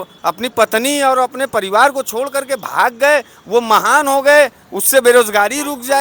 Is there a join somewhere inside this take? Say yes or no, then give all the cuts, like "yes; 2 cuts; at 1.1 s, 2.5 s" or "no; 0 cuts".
no; 0 cuts